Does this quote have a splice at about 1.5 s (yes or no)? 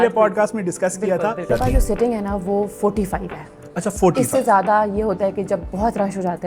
yes